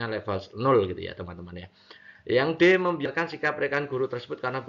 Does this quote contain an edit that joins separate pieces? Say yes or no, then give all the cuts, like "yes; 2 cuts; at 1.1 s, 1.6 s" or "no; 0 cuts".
yes; 1 cut; at 3.5 s